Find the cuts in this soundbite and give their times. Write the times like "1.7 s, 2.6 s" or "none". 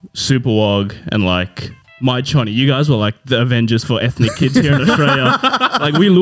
none